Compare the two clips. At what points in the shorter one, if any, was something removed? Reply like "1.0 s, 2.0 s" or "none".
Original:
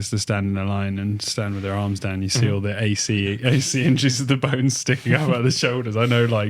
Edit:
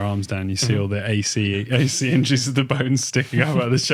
none